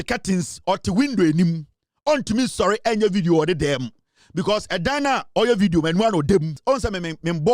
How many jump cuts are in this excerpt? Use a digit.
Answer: 1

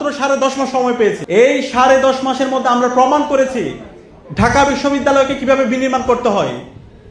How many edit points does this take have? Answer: 1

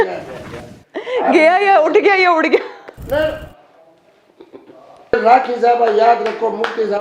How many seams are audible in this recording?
1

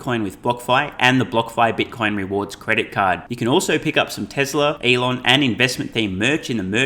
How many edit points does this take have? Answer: 1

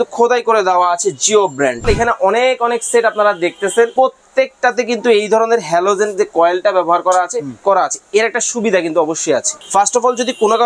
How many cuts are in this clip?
4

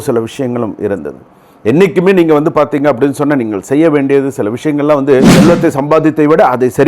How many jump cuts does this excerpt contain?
1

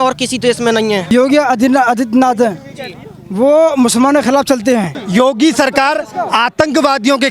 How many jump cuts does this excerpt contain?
2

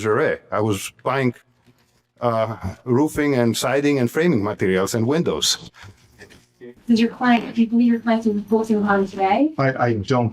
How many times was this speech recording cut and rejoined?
1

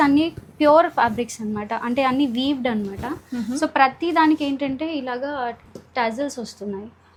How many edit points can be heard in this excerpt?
0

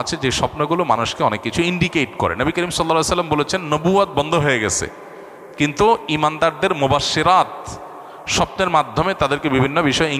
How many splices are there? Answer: 0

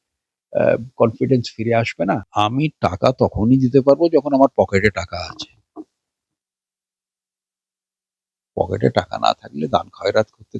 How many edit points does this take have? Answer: 1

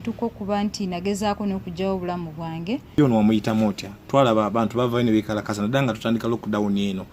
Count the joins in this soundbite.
1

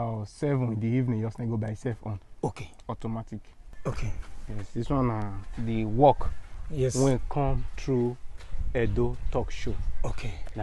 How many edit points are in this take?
1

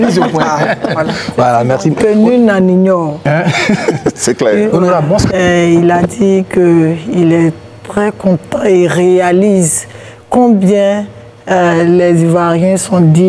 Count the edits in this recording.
1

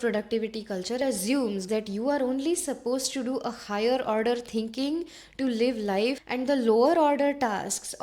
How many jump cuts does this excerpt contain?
2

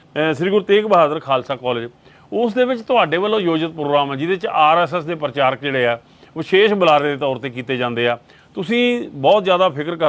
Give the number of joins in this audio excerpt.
0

